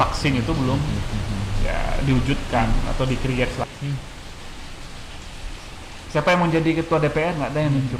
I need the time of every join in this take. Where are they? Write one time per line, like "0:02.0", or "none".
0:03.6